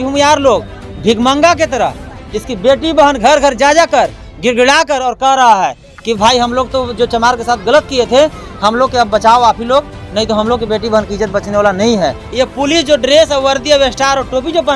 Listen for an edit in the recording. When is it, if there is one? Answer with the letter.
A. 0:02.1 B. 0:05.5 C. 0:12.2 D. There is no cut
C